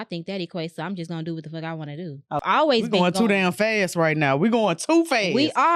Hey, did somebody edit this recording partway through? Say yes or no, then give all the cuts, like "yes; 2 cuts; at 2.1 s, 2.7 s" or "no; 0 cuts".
yes; 1 cut; at 2.4 s